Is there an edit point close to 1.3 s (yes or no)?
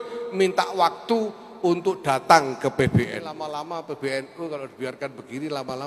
no